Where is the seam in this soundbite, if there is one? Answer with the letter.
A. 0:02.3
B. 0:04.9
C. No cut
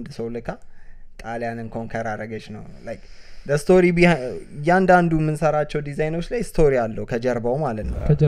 C